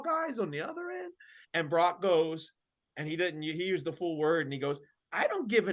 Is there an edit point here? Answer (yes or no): no